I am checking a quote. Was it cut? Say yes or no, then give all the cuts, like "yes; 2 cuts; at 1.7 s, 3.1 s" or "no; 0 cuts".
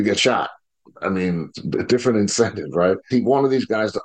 yes; 2 cuts; at 1.5 s, 3.1 s